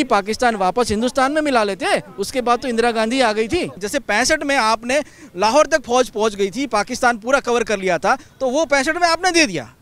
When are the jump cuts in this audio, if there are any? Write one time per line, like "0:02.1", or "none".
0:03.8